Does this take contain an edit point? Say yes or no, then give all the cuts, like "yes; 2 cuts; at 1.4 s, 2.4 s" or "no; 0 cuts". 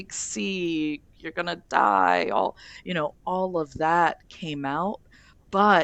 no; 0 cuts